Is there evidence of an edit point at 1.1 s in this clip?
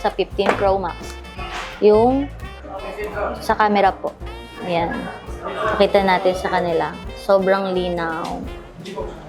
no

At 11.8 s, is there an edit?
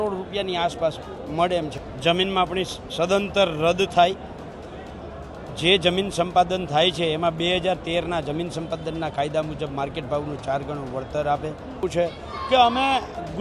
yes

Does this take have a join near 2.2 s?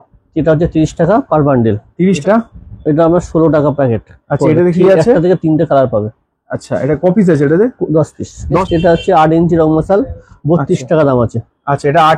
yes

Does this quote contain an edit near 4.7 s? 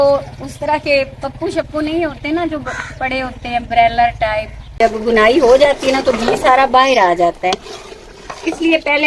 yes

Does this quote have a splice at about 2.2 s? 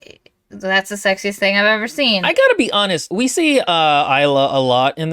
yes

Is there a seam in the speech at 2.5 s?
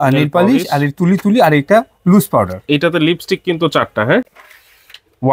no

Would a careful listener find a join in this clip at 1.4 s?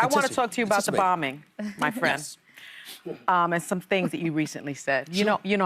yes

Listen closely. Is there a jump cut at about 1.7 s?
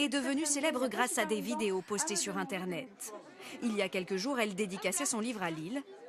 yes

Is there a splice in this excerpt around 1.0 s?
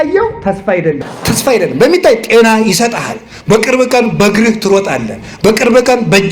yes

